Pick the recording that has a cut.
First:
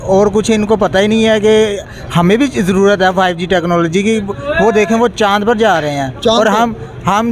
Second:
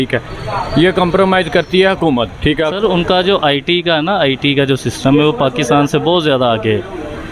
second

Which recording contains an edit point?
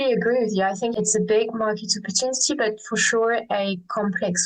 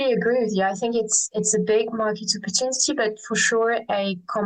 first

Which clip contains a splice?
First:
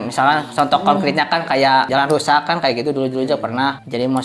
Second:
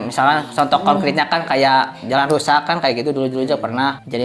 first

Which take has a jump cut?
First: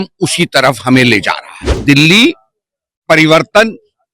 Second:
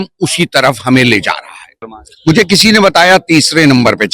first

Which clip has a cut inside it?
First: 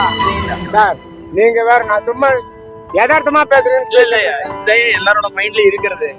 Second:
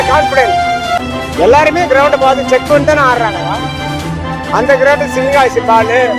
second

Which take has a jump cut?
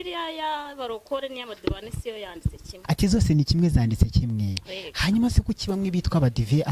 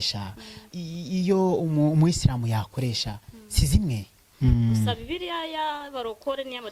second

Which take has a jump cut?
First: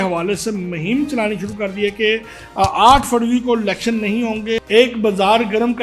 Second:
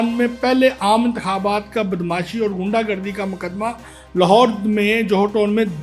first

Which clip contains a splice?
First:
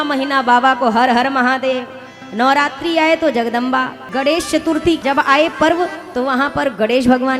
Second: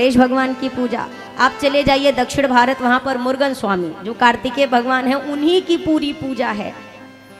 first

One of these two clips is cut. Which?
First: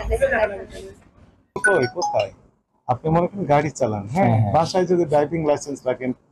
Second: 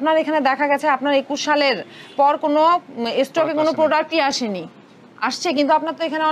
first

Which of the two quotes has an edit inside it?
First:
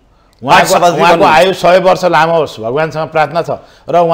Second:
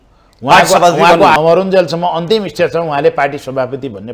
second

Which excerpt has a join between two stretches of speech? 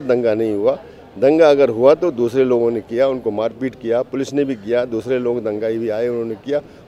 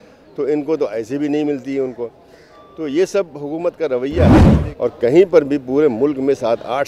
second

